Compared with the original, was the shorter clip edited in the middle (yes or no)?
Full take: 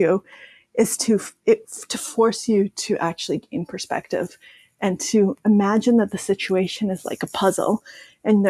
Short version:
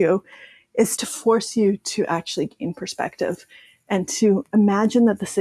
yes